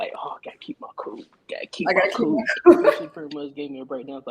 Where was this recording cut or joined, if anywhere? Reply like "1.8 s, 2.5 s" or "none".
3.1 s